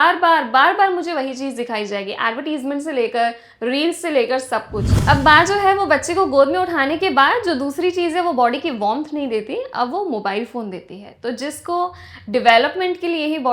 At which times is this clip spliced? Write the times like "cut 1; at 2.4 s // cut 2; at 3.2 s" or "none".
cut 1; at 4.9 s